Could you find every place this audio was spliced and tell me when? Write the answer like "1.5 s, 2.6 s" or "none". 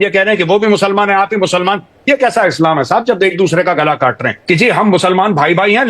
4.3 s